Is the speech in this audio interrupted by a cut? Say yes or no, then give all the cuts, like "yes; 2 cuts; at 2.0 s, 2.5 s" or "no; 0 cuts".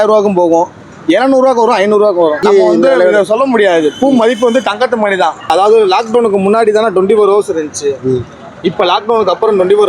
yes; 2 cuts; at 2.4 s, 5.5 s